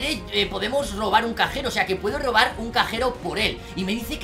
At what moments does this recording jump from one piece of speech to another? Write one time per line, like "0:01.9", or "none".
none